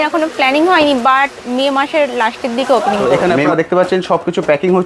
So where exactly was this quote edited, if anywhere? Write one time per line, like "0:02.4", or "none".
0:03.1

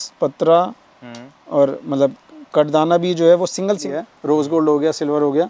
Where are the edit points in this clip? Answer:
0:03.9

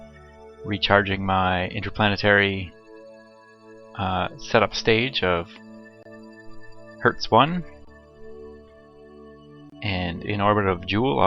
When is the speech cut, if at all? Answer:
0:04.8

